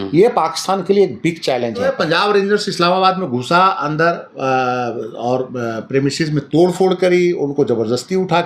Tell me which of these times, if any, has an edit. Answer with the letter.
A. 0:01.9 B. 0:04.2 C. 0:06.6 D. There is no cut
A